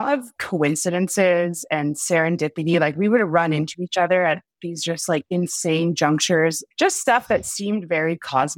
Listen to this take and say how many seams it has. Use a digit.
1